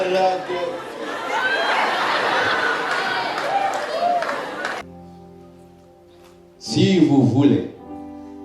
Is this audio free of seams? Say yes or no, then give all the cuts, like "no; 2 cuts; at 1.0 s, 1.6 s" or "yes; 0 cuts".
no; 1 cut; at 4.8 s